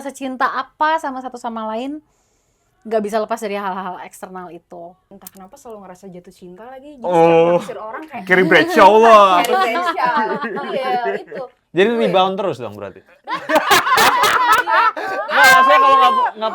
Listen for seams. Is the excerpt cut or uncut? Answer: cut